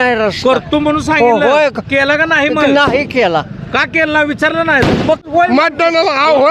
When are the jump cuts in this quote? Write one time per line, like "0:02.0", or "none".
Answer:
0:05.3